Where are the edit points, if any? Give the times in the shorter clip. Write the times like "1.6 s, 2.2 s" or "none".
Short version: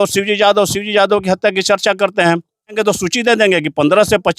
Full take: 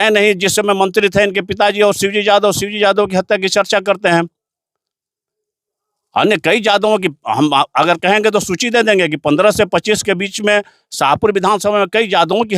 2.8 s

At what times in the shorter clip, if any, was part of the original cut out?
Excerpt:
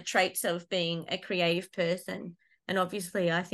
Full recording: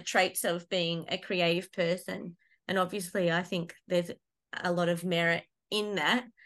none

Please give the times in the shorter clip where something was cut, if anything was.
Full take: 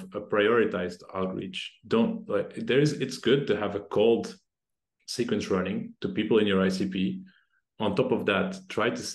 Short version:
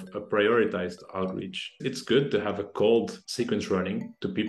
1.8 s, 3.2 s

